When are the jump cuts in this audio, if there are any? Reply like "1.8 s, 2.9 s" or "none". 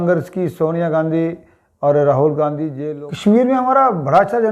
2.7 s

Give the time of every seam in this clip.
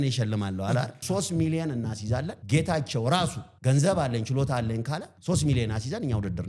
1.0 s, 2.4 s, 3.5 s, 5.1 s

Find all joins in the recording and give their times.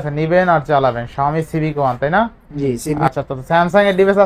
3.1 s

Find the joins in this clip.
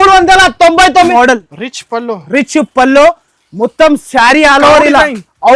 1.1 s

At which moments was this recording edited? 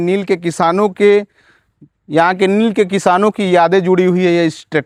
none

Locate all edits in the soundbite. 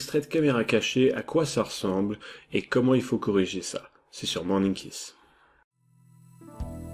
none

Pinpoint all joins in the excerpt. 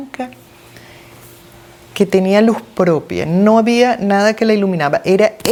none

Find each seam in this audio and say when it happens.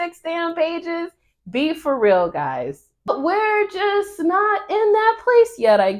3.1 s

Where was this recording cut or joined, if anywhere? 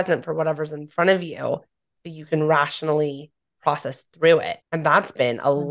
4.6 s

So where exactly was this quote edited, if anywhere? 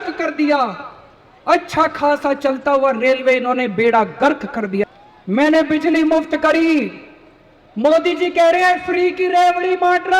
4.8 s

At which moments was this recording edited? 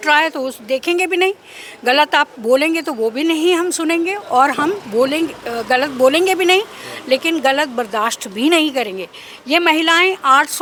none

